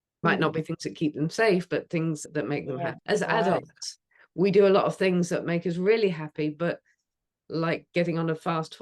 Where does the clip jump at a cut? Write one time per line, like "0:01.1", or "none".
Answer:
0:03.0